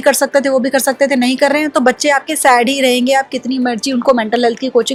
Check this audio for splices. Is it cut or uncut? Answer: uncut